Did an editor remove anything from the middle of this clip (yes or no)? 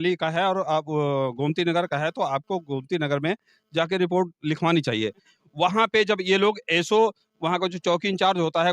yes